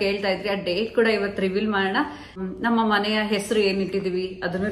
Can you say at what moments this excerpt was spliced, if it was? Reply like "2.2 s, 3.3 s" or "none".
2.4 s